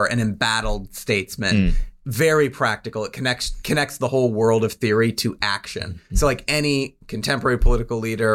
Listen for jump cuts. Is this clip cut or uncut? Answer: uncut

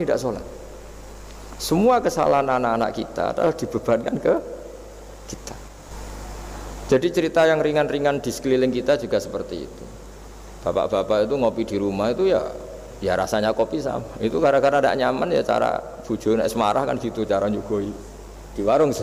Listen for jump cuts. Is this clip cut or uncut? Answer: cut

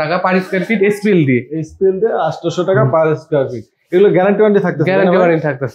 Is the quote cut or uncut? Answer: uncut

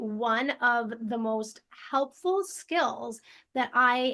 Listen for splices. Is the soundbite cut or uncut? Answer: uncut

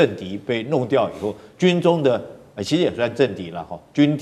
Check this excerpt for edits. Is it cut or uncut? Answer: uncut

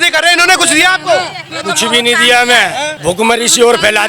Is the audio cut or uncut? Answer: cut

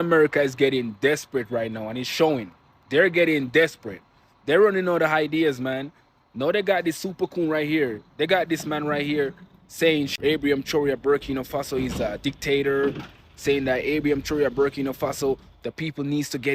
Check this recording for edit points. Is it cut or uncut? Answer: cut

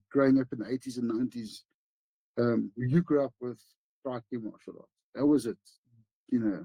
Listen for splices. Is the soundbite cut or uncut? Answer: uncut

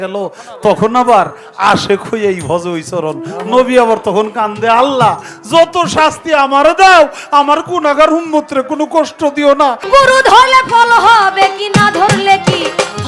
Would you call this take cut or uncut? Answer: cut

